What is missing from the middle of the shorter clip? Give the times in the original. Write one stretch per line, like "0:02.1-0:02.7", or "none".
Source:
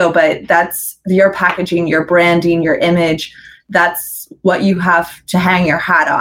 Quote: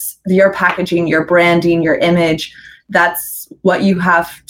none

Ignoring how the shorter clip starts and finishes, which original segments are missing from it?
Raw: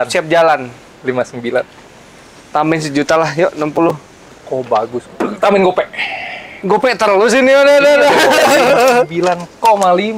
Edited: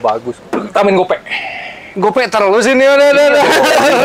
none

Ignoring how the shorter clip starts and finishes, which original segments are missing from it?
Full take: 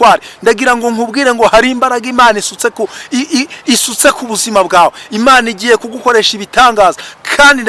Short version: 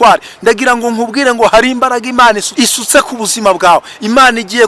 0:02.5-0:03.6

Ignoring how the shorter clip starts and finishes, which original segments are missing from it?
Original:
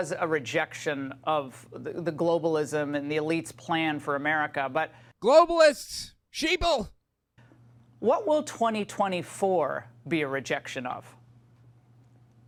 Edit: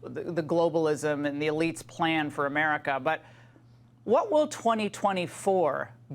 0:05.0-0:07.3

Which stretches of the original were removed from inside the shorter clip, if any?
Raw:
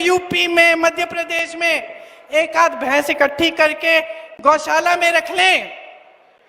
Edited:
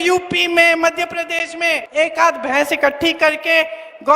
0:01.9-0:02.2

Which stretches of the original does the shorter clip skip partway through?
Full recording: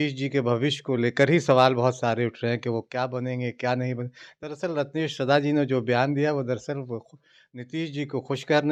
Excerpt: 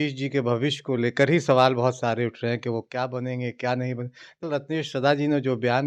0:04.4-0:04.7

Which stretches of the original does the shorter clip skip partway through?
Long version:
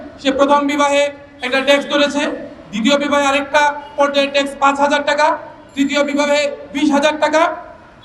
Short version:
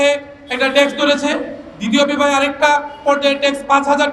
none

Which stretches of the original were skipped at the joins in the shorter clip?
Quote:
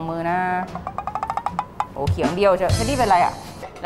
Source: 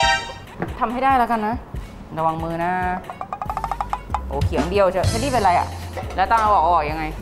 none

